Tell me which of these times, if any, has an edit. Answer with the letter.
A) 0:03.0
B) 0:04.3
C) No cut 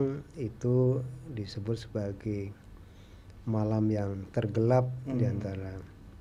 C